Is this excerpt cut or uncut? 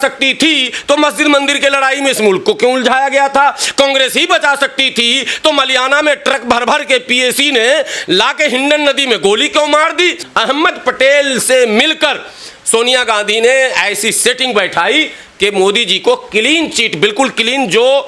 cut